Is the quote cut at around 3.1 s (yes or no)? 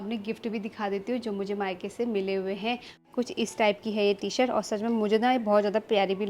yes